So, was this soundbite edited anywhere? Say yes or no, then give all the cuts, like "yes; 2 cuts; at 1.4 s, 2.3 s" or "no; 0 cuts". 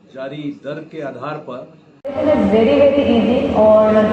yes; 1 cut; at 1.8 s